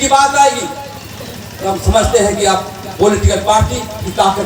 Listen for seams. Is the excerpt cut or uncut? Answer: uncut